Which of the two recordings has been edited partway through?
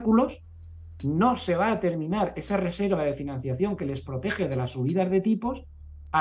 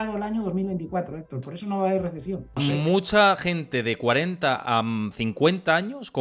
second; 1 cut; at 2.5 s

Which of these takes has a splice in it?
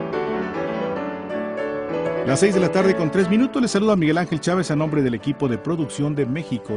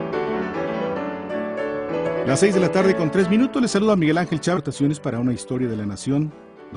first; 1 cut; at 4.6 s

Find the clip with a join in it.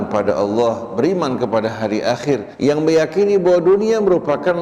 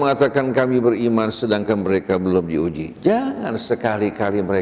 first; 1 cut; at 2.5 s

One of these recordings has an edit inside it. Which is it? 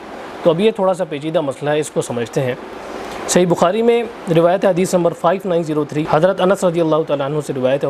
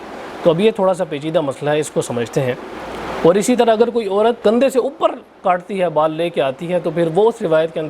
second; 2 cuts; at 2.8 s, 4.4 s

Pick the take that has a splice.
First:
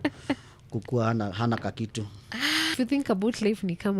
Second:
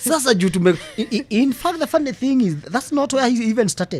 first; 1 cut; at 2.7 s

